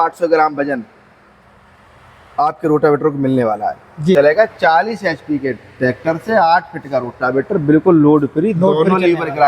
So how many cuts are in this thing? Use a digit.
1